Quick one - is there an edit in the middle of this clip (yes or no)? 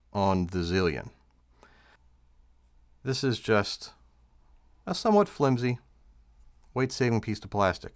yes